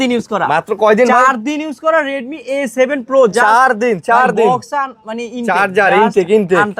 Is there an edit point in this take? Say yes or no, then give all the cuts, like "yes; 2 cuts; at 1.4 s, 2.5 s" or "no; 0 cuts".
no; 0 cuts